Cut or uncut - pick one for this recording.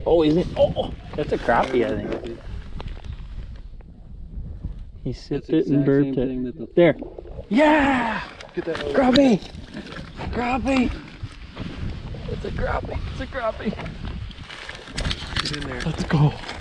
uncut